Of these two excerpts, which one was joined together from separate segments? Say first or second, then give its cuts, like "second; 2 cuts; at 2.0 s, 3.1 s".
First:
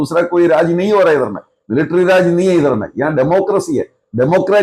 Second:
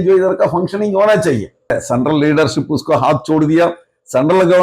second; 1 cut; at 1.7 s